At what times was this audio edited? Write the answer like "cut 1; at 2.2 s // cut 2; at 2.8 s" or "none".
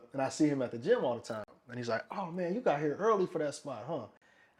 none